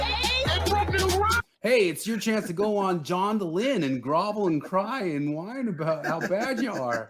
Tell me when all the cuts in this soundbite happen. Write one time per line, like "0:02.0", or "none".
0:01.5